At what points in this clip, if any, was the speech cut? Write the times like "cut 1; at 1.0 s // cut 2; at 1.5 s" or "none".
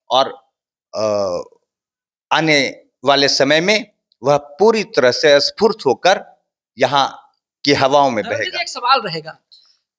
none